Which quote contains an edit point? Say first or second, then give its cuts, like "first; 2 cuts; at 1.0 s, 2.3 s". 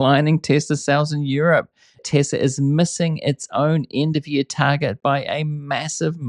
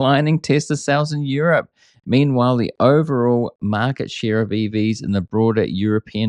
first; 1 cut; at 2.0 s